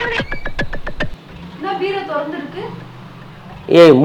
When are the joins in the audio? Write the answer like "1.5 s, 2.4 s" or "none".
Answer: 1.1 s